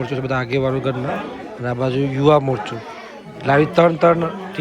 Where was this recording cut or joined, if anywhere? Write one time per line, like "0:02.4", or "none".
none